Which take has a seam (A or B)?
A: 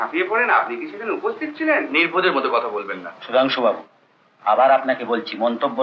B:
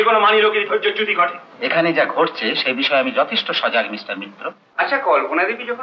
B